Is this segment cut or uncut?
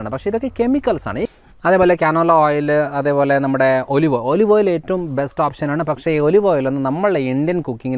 cut